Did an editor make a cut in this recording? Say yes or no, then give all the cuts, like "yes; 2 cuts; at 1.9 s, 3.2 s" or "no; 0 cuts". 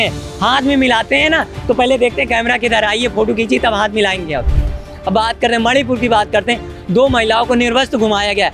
no; 0 cuts